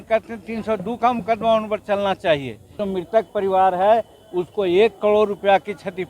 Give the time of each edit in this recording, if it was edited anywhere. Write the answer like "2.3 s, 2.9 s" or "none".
2.8 s